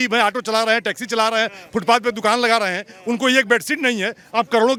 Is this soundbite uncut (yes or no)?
yes